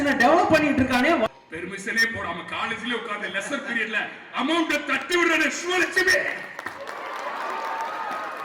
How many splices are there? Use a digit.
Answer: 1